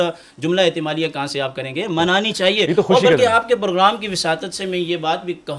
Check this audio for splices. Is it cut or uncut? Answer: uncut